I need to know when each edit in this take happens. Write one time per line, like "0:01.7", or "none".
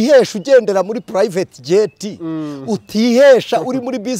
none